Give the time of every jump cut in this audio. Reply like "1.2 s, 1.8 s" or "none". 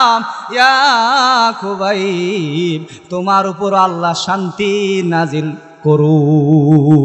none

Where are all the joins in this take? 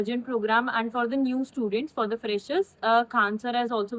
none

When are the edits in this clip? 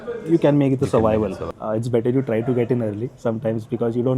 1.6 s

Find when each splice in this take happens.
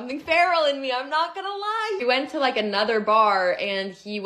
2.3 s

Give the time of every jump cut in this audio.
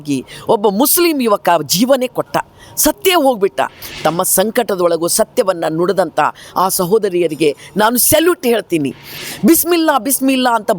3.8 s, 9.2 s

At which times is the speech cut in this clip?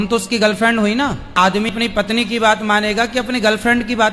1.7 s

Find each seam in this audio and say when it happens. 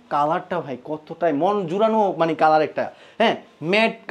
none

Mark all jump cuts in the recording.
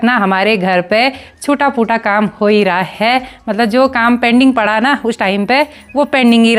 none

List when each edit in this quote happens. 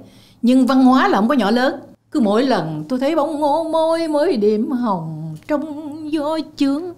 1.9 s

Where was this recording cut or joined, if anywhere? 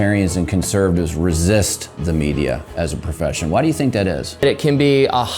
4.4 s

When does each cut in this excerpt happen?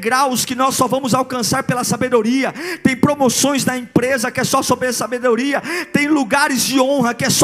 none

